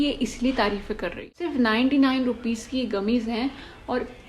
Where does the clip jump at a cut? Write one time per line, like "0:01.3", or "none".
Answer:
0:01.3